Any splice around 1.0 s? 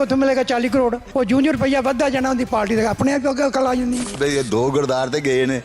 yes; 2 cuts; at 1.0 s, 4.1 s

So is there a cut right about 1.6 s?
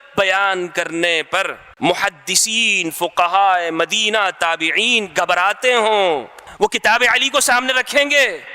yes; 2 cuts; at 1.6 s, 6.4 s

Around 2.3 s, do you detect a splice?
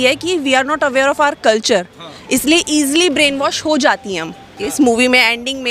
no; 1 cut; at 4.6 s

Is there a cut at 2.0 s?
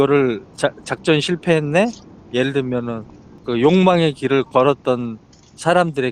no; 0 cuts

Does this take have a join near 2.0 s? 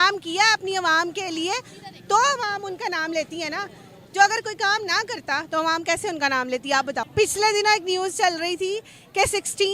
no; 1 cut; at 7.0 s

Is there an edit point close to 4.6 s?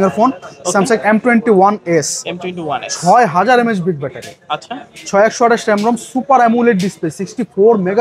no; 0 cuts

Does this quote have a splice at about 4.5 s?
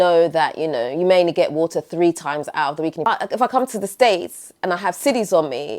no; 1 cut; at 3.1 s

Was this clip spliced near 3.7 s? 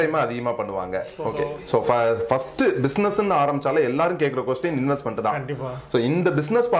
no; 1 cut; at 1.3 s

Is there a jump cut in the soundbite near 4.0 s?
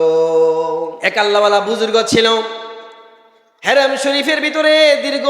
no; 1 cut; at 1.0 s

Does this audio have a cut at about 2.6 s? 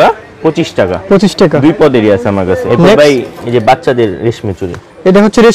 yes; 1 cut; at 2.6 s

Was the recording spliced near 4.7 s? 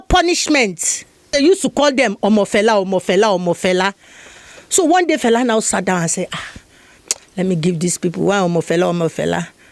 no; 1 cut; at 1.3 s

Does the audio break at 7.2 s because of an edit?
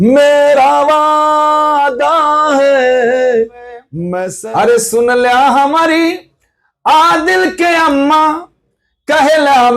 no; 1 cut; at 4.0 s

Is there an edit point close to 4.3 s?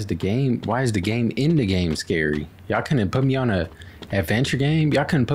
no; 0 cuts

